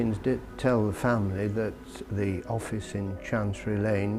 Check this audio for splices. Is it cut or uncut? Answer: uncut